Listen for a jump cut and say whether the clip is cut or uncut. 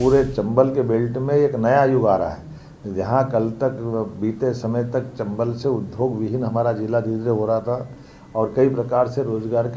uncut